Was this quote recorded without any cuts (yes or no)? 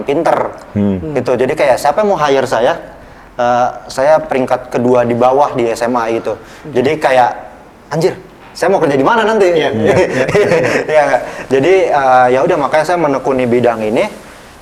yes